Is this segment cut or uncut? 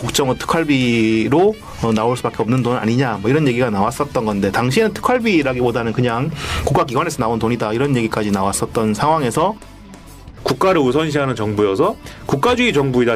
cut